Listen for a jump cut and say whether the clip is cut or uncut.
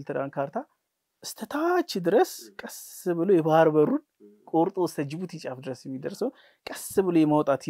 uncut